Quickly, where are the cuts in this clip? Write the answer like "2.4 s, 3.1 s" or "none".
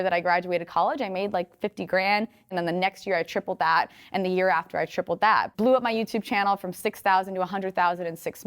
2.5 s, 5.5 s

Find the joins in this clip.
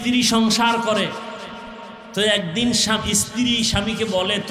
none

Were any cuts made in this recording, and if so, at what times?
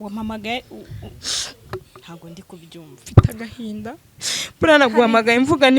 3.0 s

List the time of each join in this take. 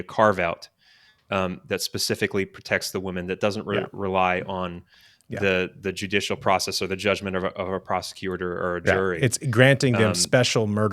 none

